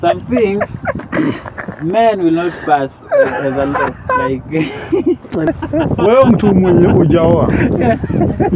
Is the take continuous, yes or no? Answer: no